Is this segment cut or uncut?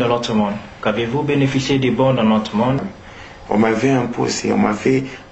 cut